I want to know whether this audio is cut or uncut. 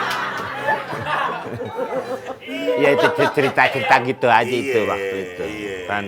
uncut